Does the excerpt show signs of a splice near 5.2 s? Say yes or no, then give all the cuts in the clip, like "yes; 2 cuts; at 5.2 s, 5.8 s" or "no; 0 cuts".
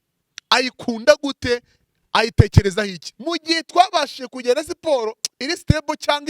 no; 1 cut; at 3.1 s